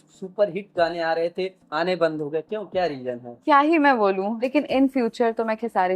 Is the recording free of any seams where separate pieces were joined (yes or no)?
no